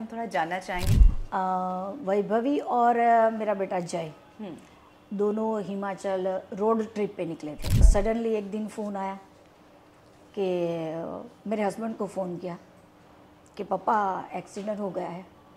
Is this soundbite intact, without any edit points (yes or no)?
no